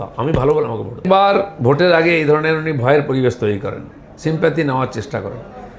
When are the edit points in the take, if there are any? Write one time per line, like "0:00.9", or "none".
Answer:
0:01.0